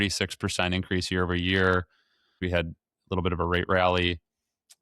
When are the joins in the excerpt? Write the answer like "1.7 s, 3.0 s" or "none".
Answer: 2.4 s